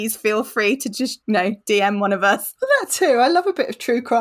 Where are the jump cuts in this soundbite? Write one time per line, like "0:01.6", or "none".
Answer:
0:01.2
0:02.5